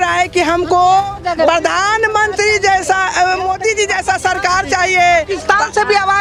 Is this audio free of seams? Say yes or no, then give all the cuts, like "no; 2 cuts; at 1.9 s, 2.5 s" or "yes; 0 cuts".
yes; 0 cuts